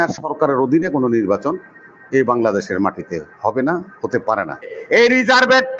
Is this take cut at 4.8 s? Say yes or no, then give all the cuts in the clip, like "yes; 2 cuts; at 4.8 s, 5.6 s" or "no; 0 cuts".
yes; 1 cut; at 4.8 s